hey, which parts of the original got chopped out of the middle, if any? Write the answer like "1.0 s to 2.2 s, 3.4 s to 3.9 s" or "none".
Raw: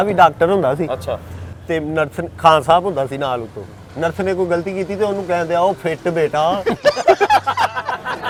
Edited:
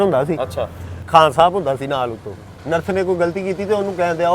1.4 s to 2.2 s